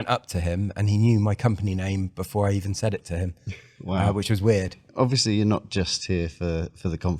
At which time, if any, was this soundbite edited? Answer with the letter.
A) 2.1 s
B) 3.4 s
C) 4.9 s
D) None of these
C